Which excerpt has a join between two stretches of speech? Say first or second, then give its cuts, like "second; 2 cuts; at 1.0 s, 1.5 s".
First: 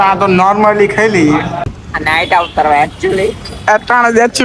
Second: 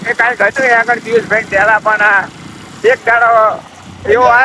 first; 1 cut; at 1.6 s